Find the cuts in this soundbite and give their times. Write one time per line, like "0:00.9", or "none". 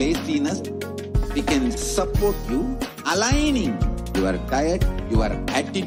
none